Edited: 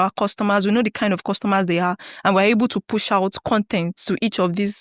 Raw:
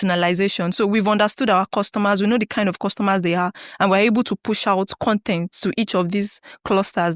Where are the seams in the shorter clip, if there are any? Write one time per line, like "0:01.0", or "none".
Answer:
none